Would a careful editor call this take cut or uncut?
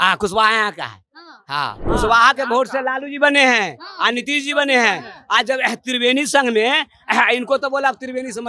cut